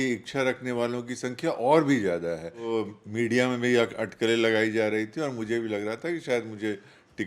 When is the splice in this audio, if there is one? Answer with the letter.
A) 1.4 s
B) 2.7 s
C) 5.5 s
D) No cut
B